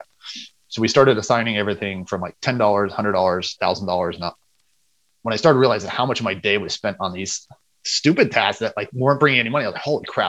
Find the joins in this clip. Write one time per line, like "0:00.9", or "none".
none